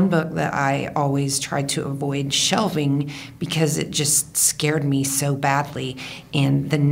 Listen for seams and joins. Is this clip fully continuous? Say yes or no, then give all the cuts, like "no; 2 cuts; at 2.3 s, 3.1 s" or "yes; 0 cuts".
yes; 0 cuts